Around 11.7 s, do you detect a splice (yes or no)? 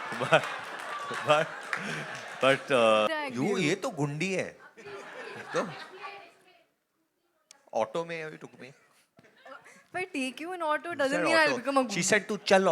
no